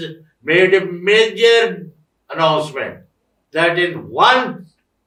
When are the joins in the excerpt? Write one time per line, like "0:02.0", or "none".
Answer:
none